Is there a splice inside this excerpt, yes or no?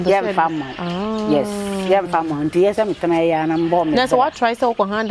no